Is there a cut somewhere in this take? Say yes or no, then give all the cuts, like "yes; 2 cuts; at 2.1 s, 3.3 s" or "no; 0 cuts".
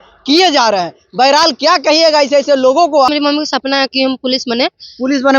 yes; 1 cut; at 3.1 s